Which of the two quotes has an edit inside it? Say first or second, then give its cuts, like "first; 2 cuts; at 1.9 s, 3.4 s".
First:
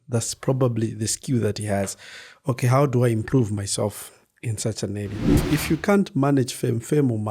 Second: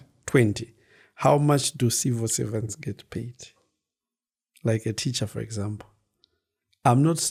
first; 1 cut; at 5.4 s